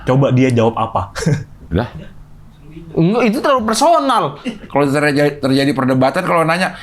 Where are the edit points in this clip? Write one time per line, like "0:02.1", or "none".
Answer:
0:04.6